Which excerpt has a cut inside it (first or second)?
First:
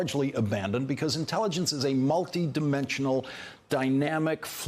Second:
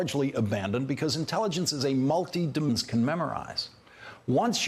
first